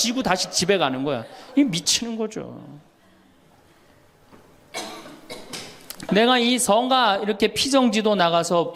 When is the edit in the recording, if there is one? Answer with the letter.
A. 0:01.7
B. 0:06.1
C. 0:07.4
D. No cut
B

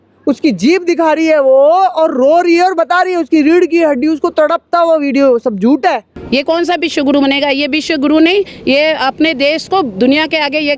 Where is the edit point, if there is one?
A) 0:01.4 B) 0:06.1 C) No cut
B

